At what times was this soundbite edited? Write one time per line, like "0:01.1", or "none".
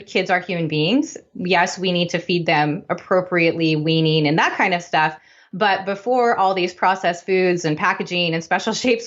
none